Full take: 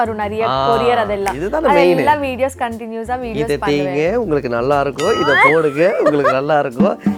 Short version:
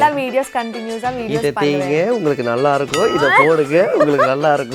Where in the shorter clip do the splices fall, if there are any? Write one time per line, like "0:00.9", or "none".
none

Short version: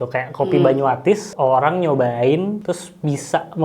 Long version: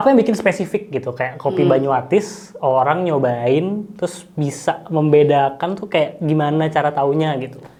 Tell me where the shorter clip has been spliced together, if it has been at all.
0:01.3
0:02.6

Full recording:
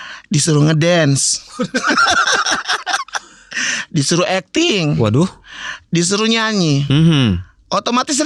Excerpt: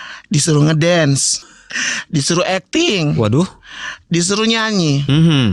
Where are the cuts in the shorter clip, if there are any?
0:01.4

